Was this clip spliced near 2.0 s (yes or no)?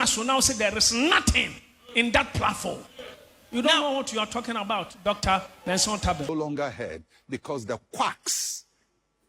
no